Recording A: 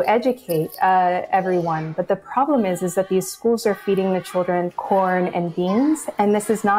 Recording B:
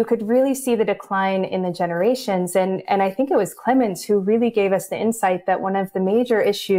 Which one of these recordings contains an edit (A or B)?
A